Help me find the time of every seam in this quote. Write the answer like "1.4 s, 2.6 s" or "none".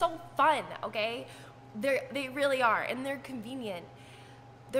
none